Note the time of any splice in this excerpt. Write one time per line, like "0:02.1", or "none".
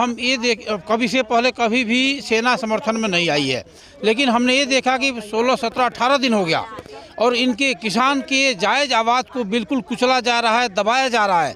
none